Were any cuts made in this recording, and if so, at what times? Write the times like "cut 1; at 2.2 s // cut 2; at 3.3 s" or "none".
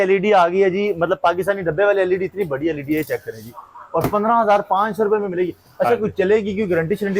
none